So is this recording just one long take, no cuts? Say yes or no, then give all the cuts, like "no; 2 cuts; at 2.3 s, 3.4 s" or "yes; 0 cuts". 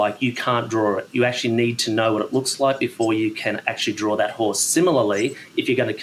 yes; 0 cuts